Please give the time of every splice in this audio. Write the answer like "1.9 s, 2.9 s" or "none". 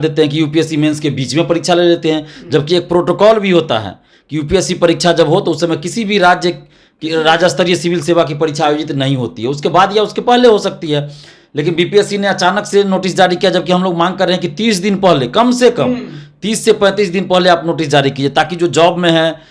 none